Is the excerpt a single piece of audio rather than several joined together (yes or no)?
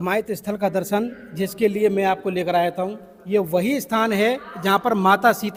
yes